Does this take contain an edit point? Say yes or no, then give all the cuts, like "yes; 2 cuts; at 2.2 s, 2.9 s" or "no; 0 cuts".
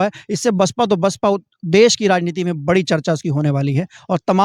no; 0 cuts